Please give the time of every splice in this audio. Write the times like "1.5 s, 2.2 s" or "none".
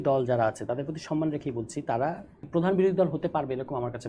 2.5 s